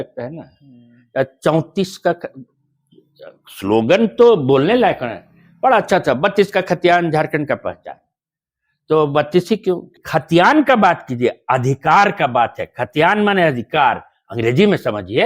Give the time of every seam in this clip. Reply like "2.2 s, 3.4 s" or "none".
10.0 s